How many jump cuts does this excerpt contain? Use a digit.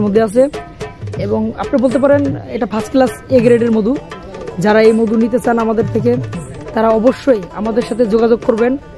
0